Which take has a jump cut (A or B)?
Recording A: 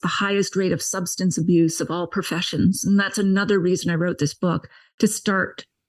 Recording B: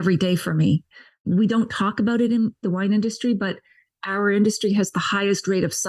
B